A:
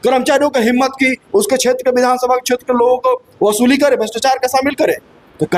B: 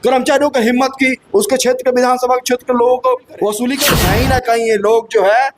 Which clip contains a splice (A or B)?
B